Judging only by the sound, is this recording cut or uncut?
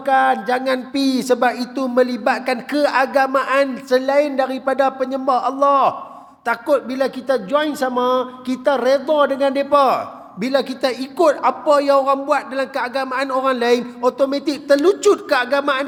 uncut